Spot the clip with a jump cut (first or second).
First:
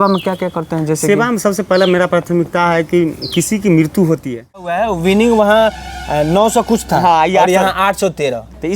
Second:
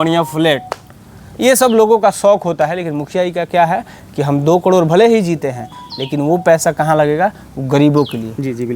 first